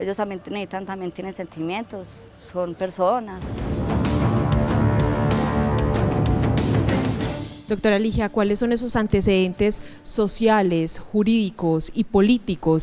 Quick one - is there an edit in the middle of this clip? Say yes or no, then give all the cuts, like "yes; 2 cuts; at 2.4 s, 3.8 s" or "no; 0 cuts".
no; 0 cuts